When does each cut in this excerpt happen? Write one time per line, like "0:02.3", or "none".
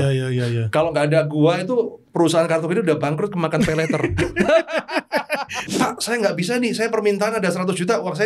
0:05.6